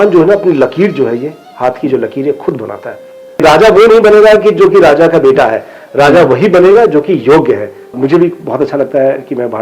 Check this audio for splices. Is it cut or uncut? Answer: cut